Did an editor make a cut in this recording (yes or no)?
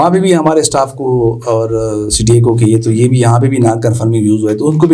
no